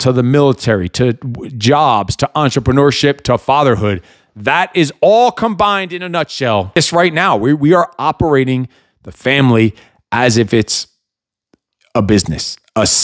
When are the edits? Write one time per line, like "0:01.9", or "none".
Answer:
0:06.8